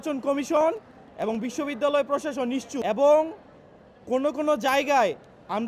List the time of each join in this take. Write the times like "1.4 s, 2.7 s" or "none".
2.7 s